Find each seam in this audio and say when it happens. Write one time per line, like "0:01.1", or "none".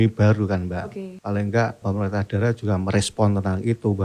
0:01.1
0:01.8